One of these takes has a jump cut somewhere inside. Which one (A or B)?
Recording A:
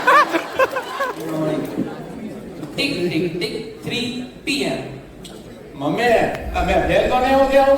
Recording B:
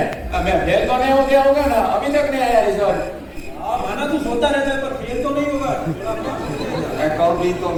A